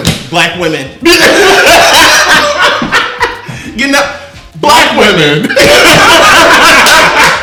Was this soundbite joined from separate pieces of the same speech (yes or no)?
no